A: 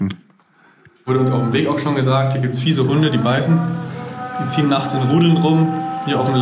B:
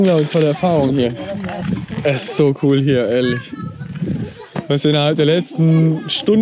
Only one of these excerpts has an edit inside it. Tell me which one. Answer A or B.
A